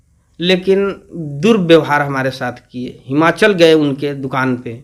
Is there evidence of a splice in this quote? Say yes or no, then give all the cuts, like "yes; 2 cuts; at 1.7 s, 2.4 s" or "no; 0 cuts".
no; 0 cuts